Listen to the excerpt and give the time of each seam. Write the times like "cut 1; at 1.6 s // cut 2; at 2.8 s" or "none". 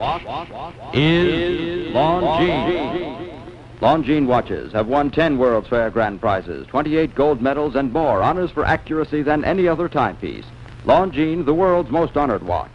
cut 1; at 8.5 s